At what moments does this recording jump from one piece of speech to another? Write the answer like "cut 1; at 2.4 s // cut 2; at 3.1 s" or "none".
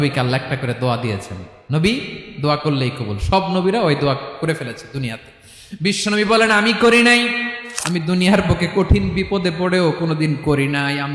cut 1; at 7.6 s